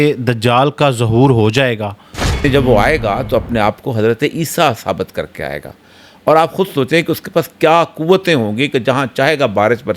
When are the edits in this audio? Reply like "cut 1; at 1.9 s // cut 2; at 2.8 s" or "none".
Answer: cut 1; at 2.4 s